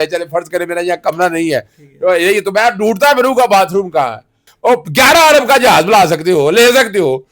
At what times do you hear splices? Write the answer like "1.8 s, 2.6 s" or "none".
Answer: 4.5 s